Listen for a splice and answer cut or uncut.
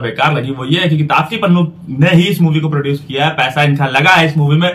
uncut